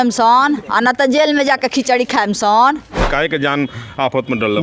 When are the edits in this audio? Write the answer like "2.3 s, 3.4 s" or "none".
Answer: 3.0 s